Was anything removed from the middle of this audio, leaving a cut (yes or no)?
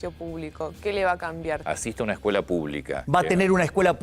yes